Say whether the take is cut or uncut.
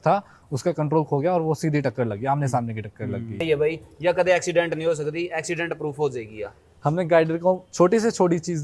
cut